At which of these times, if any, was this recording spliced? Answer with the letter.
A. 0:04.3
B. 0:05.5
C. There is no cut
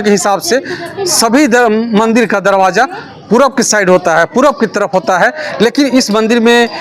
C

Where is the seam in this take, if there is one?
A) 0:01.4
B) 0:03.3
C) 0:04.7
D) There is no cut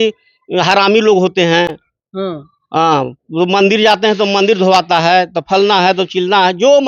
D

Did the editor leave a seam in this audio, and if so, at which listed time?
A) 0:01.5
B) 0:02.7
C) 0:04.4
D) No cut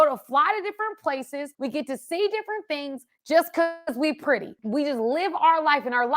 A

